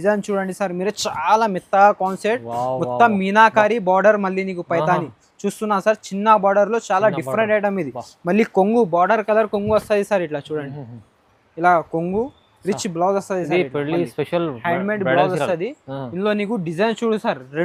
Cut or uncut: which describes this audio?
uncut